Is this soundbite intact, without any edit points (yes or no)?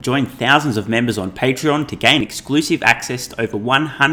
yes